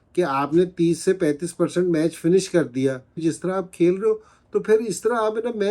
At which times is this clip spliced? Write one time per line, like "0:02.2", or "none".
0:03.2